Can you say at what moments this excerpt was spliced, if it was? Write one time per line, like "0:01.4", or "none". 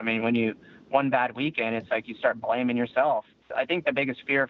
0:03.4

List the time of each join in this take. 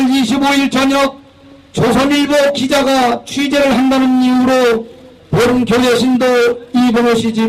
none

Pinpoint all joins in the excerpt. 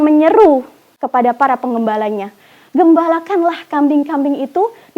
0:01.0

